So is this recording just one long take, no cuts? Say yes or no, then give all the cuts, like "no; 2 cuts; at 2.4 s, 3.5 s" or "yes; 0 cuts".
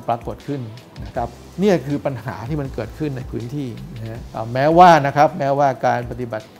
no; 2 cuts; at 1.4 s, 4.2 s